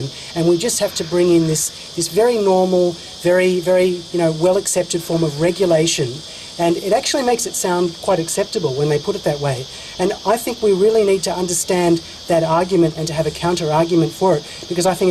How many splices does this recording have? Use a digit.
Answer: 1